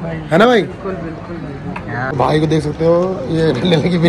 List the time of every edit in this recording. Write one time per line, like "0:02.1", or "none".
0:02.1